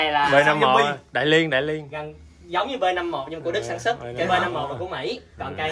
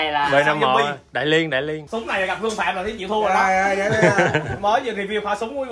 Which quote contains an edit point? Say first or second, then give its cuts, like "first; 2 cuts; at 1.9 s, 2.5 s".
second; 1 cut; at 1.8 s